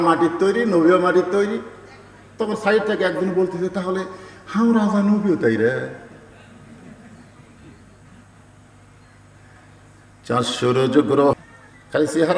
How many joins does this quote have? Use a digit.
1